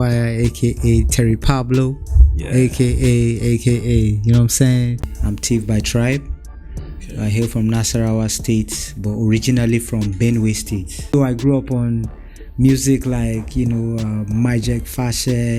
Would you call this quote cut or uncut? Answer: cut